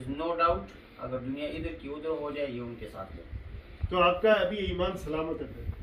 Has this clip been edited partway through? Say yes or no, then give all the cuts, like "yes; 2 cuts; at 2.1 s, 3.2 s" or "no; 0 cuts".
no; 0 cuts